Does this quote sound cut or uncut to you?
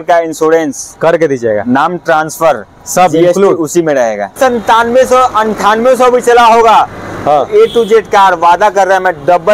cut